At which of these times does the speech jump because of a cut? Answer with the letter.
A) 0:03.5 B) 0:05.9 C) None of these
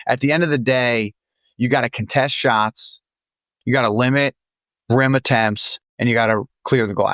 A